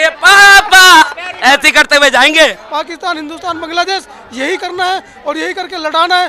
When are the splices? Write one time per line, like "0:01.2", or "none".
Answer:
0:02.6